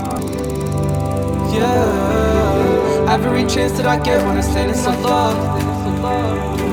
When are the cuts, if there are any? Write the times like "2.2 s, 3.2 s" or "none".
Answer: none